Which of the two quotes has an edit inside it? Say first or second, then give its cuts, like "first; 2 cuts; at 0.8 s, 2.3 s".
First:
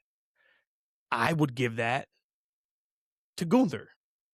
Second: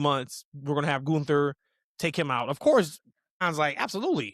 second; 1 cut; at 3.4 s